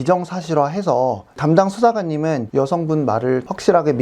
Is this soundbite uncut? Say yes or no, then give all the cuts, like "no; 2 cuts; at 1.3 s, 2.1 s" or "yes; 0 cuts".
no; 2 cuts; at 1.3 s, 2.4 s